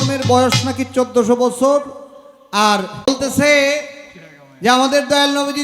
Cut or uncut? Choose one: cut